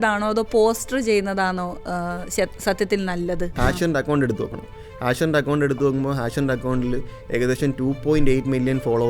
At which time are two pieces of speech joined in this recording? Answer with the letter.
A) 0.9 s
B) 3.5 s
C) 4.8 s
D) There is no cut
B